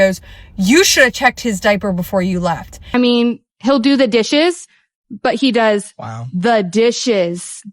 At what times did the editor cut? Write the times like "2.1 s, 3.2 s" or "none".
2.7 s